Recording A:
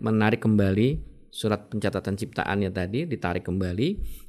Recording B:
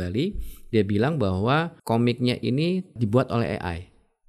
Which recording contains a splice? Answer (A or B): B